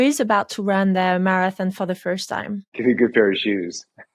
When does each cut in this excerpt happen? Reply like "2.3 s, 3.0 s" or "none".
2.7 s